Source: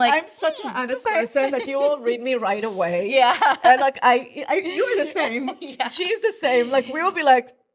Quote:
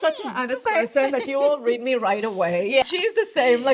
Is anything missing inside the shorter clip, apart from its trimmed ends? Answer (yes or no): yes